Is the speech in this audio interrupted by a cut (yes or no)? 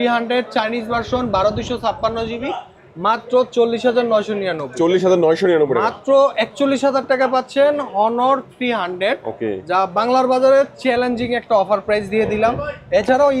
no